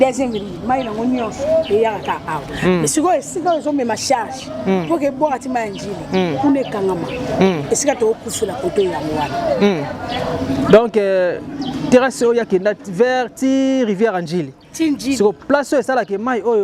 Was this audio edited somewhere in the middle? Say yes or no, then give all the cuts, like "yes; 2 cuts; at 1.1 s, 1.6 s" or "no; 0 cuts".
no; 0 cuts